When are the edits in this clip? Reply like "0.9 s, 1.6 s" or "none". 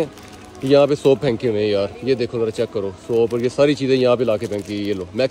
none

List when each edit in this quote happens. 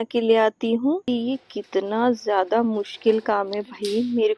1.0 s

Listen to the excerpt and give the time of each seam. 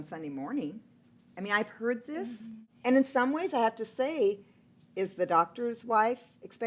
2.6 s

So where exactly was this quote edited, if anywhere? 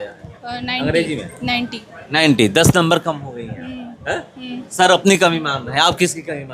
none

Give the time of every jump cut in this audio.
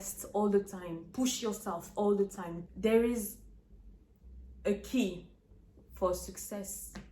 2.5 s

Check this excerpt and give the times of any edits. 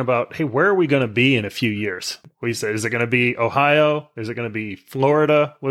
2.2 s

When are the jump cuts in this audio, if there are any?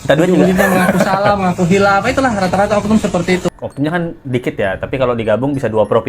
3.6 s

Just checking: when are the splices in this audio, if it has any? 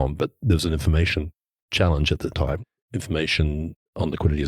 2.7 s

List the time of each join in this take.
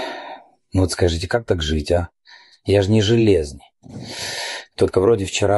1.8 s, 4.2 s

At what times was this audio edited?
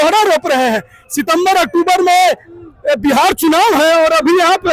none

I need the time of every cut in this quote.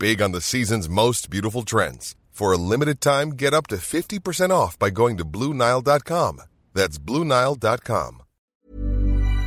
8.6 s

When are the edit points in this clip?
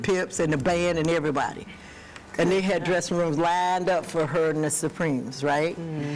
none

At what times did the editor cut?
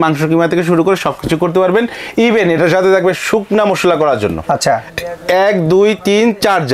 none

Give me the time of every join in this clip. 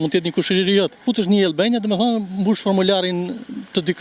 1.0 s

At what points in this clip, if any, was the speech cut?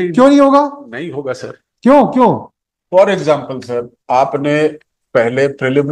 none

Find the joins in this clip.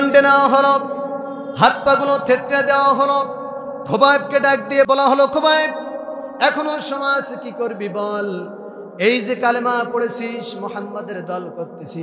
4.9 s

